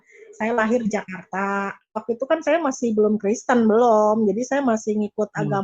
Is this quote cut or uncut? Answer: cut